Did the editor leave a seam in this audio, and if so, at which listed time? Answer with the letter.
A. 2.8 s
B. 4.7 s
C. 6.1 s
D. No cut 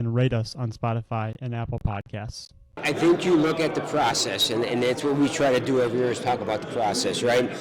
A